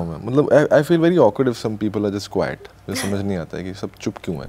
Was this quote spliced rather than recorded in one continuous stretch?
no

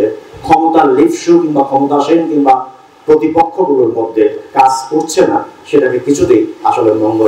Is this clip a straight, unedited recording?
yes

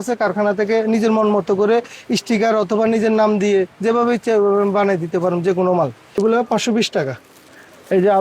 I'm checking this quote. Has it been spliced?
yes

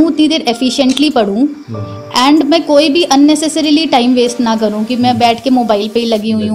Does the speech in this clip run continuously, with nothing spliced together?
yes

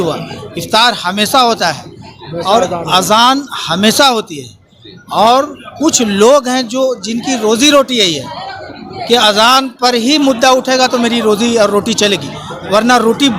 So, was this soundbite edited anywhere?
no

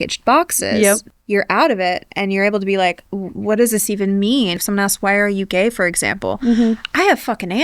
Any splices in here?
yes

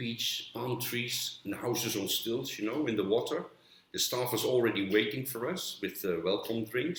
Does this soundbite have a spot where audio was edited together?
no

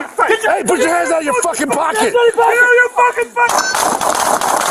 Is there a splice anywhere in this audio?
no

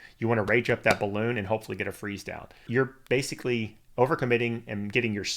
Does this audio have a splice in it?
yes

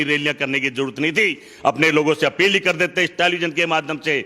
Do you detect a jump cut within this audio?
no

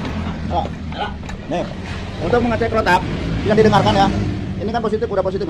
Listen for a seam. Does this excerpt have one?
no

